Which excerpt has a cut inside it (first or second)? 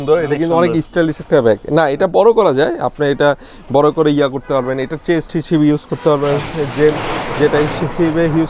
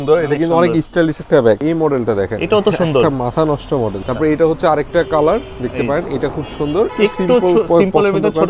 second